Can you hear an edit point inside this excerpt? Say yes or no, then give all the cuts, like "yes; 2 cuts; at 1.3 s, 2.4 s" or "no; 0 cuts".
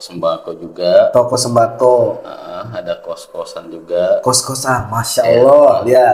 no; 0 cuts